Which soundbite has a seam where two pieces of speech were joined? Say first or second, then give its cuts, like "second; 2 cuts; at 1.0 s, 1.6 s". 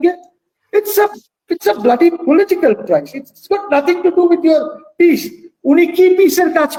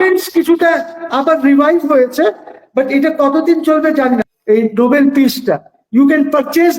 second; 1 cut; at 4.3 s